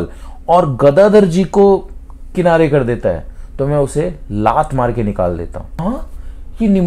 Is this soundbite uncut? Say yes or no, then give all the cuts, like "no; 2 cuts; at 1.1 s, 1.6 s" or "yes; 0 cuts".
no; 1 cut; at 5.8 s